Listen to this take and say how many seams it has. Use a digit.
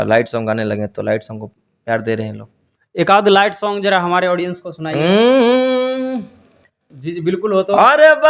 1